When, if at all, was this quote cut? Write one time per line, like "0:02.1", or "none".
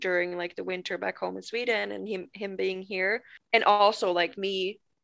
0:03.3